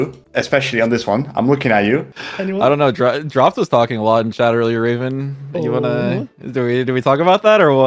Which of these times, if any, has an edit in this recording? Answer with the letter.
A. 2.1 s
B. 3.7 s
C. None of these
A